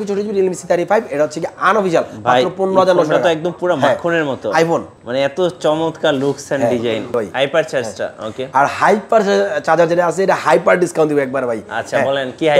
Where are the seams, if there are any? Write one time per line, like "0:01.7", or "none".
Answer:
0:05.0
0:07.1